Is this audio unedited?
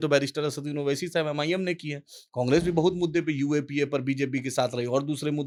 yes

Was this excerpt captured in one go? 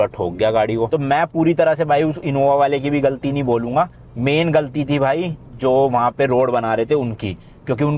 yes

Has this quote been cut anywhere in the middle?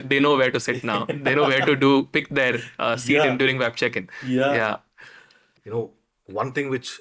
no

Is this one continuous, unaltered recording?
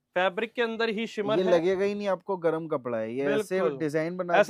yes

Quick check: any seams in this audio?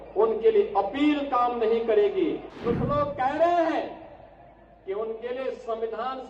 yes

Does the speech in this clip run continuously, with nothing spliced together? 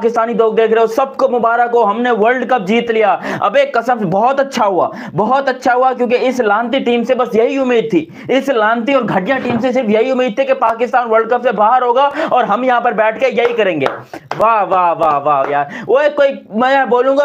yes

